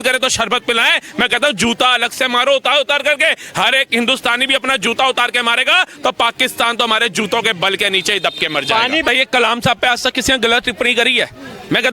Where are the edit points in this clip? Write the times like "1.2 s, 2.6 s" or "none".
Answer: 9.1 s